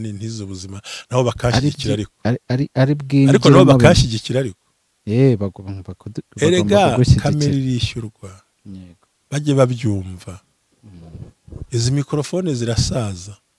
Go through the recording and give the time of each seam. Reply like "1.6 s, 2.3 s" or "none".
none